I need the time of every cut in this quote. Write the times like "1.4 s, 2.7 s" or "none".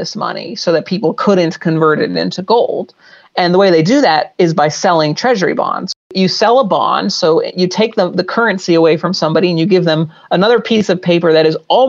5.8 s